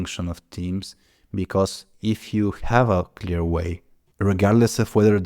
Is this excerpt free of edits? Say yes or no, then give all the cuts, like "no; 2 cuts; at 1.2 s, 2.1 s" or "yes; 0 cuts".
yes; 0 cuts